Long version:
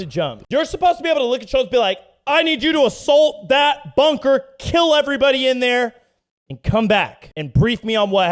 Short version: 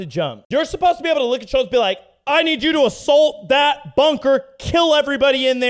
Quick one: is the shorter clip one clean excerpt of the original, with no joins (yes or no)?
yes